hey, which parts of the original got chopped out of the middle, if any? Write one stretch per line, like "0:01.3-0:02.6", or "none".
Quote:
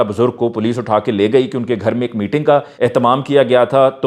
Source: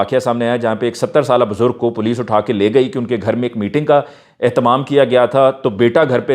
0:04.1-0:04.3